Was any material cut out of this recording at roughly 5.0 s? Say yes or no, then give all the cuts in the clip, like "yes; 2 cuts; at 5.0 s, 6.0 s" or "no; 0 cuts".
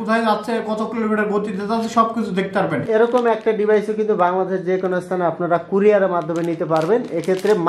no; 1 cut; at 2.8 s